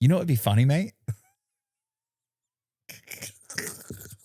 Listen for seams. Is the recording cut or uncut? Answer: uncut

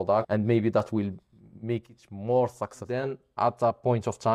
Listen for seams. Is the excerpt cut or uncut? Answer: cut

